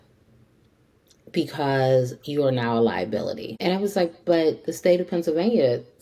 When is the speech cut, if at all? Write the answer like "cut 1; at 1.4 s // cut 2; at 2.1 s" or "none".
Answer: cut 1; at 3.5 s